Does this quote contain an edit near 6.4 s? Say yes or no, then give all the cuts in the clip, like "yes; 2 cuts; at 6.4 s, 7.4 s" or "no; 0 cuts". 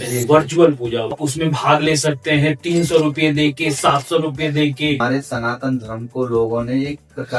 no; 2 cuts; at 1.1 s, 5.0 s